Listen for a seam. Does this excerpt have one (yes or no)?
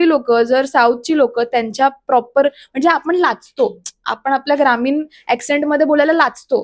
no